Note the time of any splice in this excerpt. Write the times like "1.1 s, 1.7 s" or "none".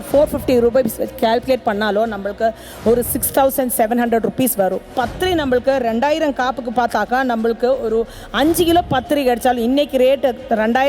4.9 s